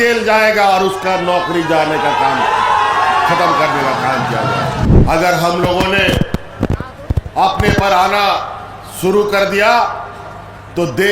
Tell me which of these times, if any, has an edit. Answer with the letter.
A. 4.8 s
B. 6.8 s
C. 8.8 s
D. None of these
A